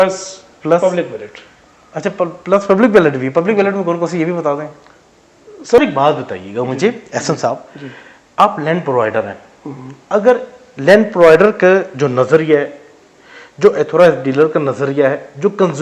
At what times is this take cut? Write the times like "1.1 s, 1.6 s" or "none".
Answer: 5.8 s